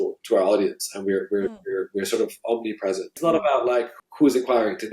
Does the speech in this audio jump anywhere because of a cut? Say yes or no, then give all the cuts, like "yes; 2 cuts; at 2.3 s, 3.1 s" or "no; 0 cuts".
yes; 2 cuts; at 3.1 s, 4.0 s